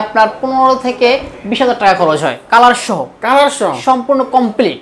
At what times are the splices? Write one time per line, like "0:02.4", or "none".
none